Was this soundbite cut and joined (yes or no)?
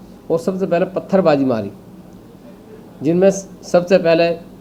no